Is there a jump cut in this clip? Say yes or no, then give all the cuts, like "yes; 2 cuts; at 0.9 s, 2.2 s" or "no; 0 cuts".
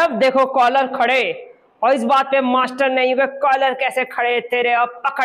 no; 0 cuts